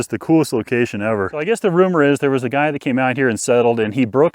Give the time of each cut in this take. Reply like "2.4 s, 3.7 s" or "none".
1.4 s